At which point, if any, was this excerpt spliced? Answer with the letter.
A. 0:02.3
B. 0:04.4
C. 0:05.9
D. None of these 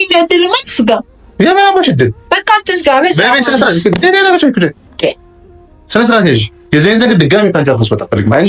D